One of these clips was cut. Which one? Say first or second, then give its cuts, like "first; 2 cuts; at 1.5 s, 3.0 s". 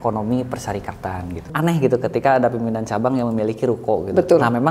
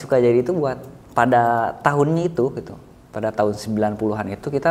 first; 1 cut; at 1.5 s